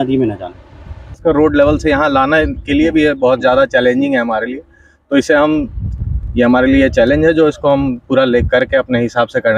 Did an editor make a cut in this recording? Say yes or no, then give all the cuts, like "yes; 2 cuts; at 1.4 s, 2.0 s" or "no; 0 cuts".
yes; 1 cut; at 1.2 s